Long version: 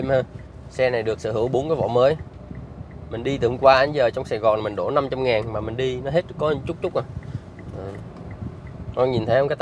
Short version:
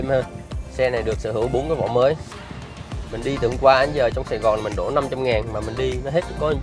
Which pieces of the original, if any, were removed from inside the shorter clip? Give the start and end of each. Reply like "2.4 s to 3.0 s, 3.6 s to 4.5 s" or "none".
none

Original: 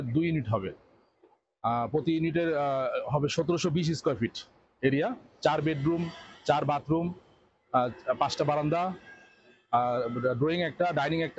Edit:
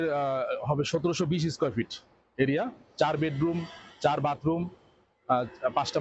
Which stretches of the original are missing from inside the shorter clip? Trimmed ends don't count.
none

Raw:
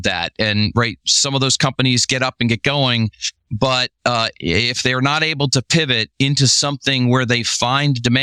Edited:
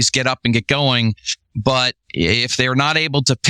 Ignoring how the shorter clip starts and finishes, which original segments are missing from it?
4.0 s to 4.3 s

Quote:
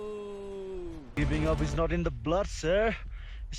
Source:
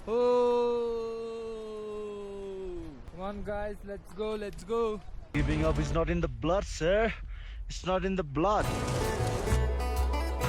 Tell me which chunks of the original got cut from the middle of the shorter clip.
2.9 s to 5.2 s

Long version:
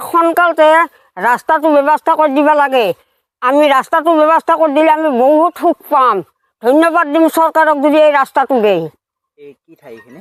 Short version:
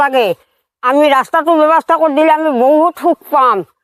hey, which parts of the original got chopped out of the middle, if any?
none

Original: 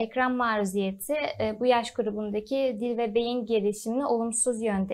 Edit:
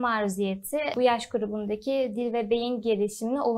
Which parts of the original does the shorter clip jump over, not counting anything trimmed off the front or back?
1.3 s to 1.6 s

